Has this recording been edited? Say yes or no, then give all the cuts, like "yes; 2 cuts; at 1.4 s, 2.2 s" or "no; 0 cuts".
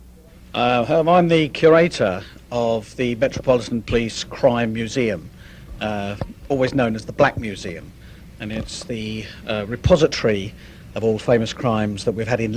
no; 0 cuts